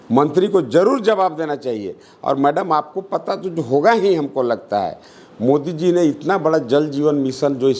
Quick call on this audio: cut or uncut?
uncut